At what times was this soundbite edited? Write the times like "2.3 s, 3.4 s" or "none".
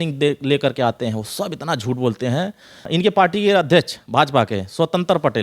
2.9 s